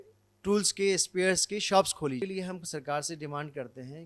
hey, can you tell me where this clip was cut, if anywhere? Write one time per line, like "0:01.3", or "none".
0:02.2